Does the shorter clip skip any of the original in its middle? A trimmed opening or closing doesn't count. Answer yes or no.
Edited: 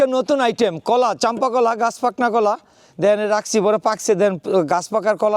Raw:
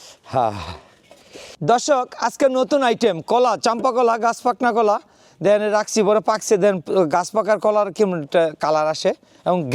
no